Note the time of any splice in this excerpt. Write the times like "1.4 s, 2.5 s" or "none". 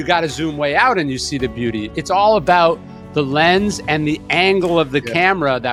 none